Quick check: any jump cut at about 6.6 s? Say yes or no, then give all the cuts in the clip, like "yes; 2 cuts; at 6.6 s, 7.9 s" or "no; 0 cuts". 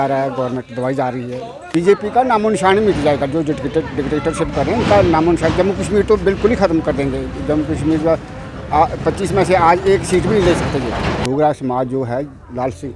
no; 2 cuts; at 1.5 s, 11.2 s